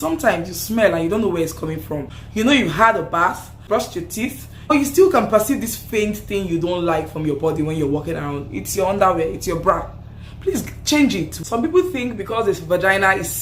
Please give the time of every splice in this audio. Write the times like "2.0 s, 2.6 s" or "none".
2.1 s, 3.6 s, 4.7 s, 11.3 s